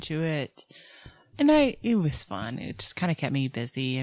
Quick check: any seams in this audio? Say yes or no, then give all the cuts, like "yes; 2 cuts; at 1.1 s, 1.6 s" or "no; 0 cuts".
yes; 1 cut; at 1.2 s